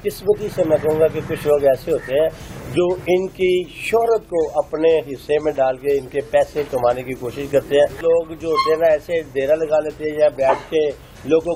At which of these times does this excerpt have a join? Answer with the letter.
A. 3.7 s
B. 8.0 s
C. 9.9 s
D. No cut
B